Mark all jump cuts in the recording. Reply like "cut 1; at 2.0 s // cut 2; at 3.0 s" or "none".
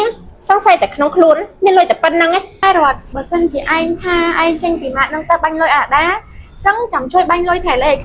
cut 1; at 2.6 s